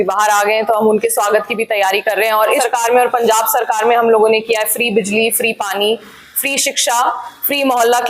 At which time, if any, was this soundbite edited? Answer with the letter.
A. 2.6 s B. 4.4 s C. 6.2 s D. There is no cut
A